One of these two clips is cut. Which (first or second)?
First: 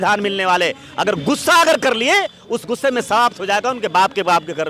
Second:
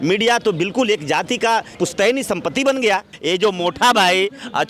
second